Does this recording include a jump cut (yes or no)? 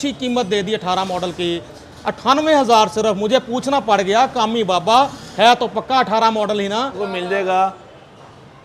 yes